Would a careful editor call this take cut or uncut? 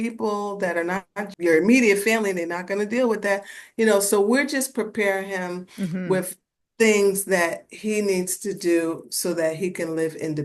uncut